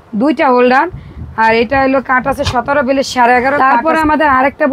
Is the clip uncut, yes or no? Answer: no